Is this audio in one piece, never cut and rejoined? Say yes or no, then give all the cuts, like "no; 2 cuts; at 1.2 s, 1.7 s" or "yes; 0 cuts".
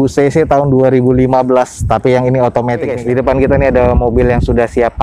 no; 1 cut; at 2.9 s